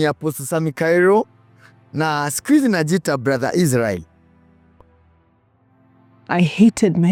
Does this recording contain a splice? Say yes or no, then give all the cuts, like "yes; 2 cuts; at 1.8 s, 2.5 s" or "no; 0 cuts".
no; 0 cuts